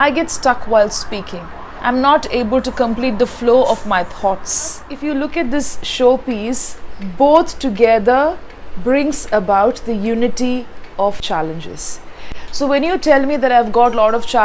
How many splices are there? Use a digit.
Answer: 2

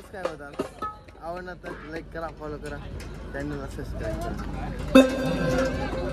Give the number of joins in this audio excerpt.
0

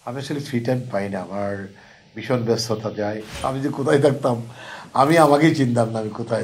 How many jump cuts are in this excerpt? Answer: 1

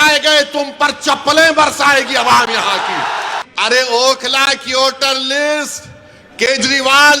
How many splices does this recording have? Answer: 1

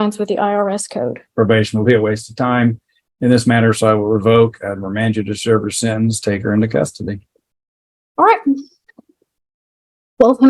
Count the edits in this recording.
1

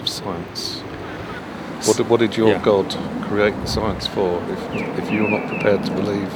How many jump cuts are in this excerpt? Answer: 1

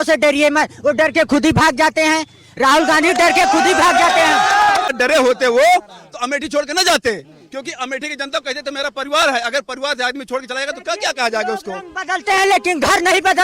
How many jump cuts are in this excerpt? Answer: 1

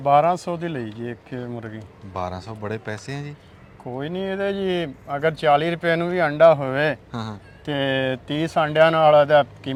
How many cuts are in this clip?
0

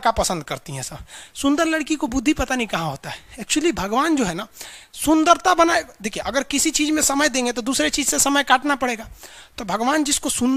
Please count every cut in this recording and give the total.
0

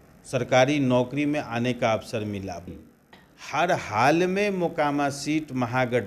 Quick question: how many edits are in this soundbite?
1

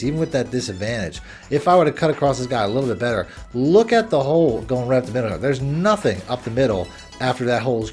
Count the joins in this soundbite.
0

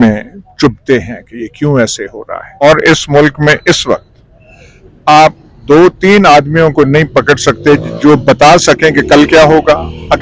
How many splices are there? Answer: 1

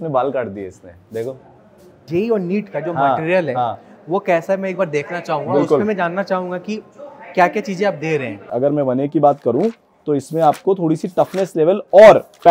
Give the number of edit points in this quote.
2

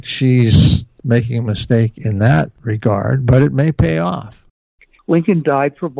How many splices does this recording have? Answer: 1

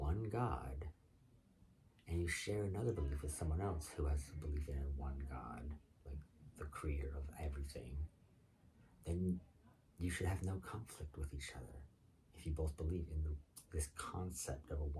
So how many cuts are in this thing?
0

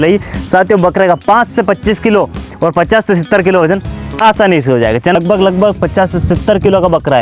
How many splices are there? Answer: 1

